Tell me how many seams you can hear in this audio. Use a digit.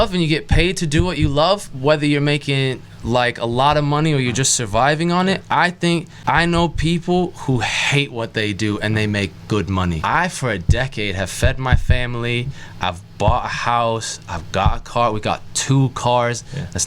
2